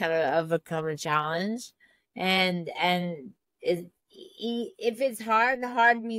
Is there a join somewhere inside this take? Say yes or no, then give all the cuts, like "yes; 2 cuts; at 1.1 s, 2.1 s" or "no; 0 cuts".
no; 0 cuts